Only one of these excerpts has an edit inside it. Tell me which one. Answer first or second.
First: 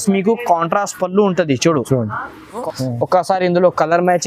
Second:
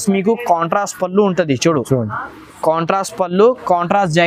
first